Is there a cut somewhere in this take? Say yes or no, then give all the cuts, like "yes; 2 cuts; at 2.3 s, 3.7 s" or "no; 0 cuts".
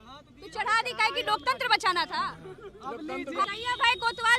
yes; 1 cut; at 3.5 s